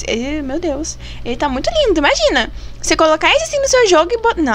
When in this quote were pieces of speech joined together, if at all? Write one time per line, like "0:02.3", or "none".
none